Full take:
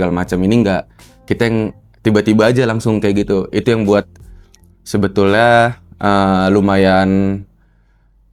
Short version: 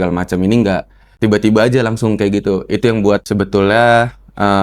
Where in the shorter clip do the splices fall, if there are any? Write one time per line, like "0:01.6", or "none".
0:01.0
0:03.2